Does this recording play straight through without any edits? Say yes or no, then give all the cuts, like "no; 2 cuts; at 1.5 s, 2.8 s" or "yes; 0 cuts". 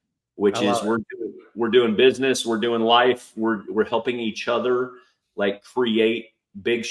yes; 0 cuts